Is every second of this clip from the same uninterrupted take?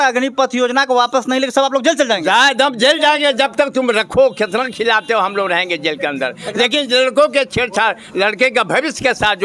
yes; 0 cuts

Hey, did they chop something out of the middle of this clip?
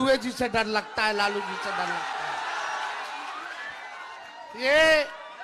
no; 0 cuts

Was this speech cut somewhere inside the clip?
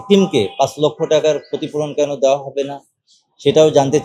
no; 0 cuts

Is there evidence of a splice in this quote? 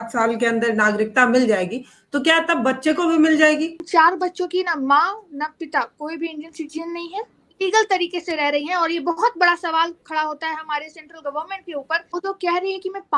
yes; 3 cuts; at 3.8 s, 7.4 s, 12.0 s

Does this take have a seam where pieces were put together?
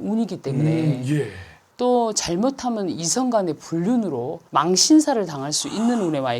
yes; 1 cut; at 1.6 s

